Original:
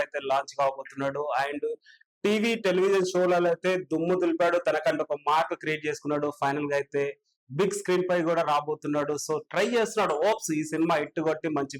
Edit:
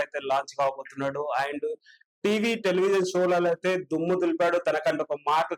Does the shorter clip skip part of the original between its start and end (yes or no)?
no